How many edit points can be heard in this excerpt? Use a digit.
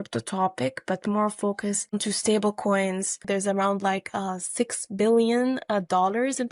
2